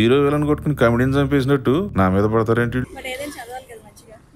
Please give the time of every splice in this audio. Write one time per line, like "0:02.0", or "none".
0:02.9